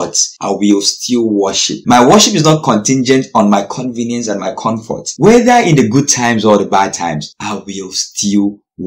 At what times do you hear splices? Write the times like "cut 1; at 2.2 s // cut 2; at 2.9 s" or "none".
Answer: cut 1; at 1.7 s // cut 2; at 5.1 s